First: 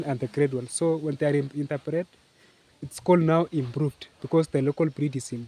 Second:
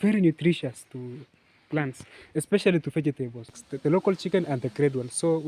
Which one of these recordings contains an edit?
second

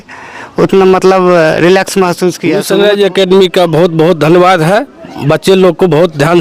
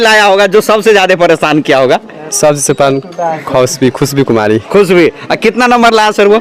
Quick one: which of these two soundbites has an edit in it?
first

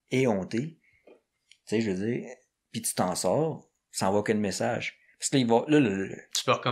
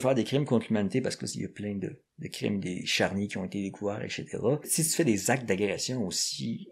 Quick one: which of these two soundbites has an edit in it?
second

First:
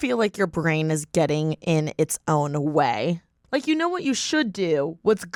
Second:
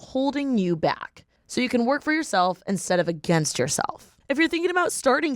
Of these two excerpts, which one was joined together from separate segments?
second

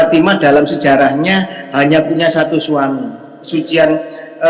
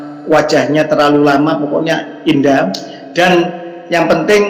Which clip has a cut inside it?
first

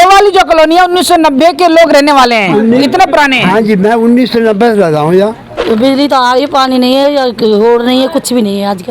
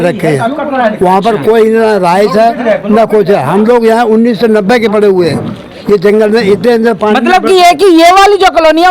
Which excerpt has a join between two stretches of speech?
first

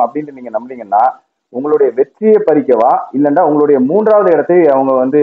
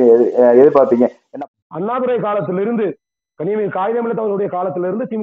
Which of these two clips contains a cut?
second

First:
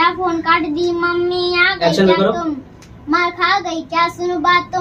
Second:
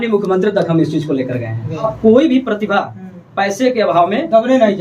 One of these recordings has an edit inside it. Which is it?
second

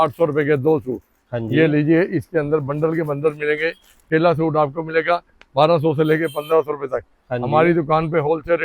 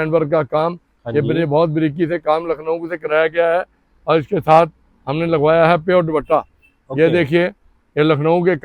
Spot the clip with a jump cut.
first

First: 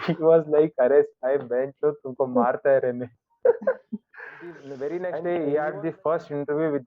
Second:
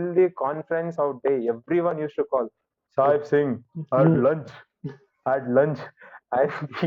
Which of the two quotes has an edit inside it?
first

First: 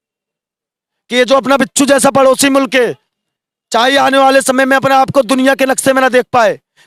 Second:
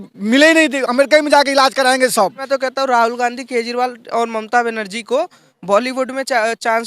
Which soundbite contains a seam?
second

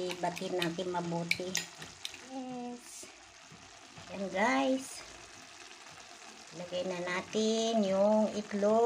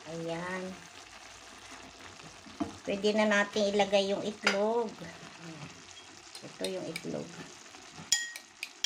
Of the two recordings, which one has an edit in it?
first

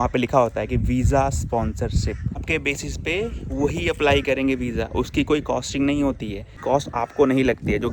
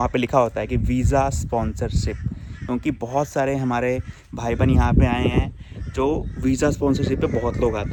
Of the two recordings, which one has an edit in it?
first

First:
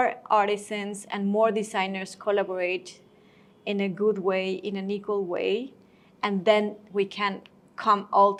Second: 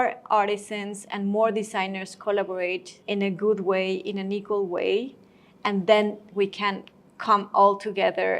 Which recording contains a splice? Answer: second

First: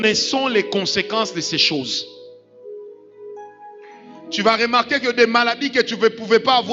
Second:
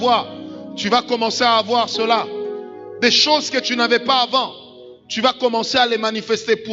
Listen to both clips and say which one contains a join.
first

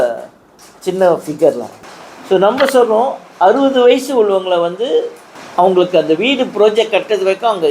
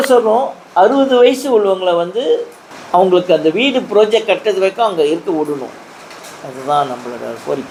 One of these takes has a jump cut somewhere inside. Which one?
first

